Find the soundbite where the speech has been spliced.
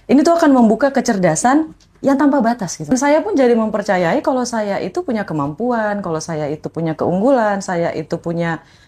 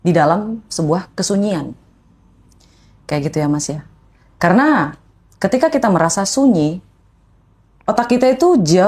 first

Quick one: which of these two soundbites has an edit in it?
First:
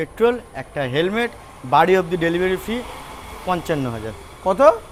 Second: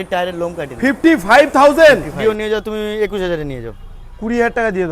second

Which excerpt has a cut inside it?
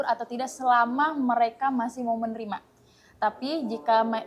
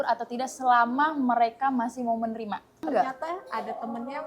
second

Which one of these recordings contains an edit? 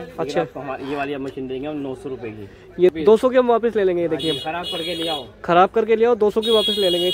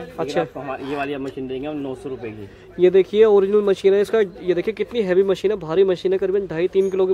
first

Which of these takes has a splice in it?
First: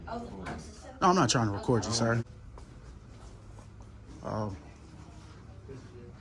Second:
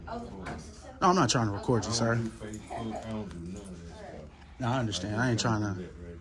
first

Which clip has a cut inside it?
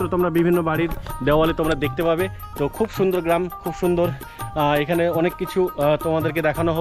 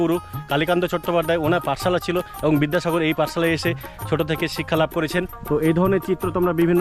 second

